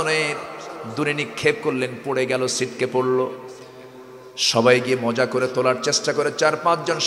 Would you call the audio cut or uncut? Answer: uncut